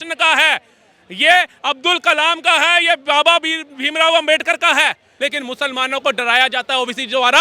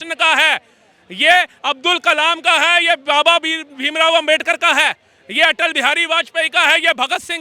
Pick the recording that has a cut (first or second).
first